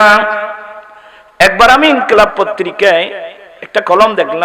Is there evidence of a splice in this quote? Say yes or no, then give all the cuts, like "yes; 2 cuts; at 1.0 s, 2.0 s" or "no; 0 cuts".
no; 0 cuts